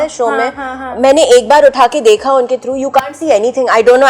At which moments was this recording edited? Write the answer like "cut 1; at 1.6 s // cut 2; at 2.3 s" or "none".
none